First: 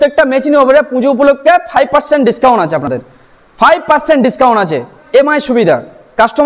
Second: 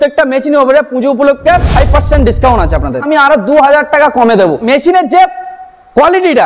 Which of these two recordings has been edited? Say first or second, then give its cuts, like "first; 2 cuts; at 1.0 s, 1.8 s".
second; 2 cuts; at 3.0 s, 4.7 s